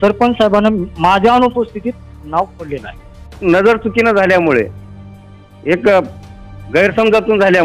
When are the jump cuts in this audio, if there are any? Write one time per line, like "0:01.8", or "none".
0:03.4